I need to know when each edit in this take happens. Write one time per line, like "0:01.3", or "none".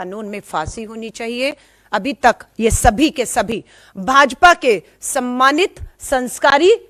none